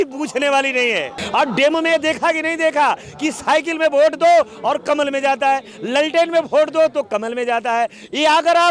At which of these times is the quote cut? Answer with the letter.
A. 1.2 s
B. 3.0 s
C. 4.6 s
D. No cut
A